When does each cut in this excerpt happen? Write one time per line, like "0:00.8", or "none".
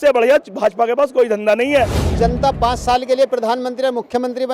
0:02.0